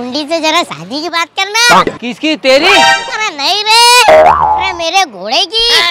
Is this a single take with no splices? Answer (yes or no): yes